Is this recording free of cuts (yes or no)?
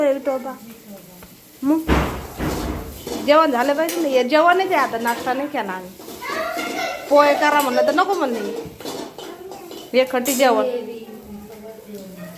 yes